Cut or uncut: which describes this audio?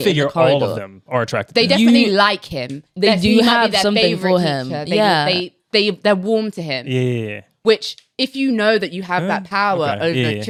uncut